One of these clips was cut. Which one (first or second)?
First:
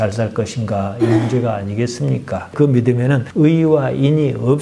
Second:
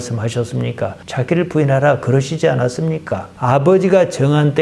first